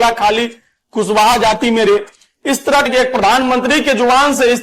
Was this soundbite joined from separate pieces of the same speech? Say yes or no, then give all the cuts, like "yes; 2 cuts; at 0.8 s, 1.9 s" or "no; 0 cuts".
yes; 1 cut; at 2.9 s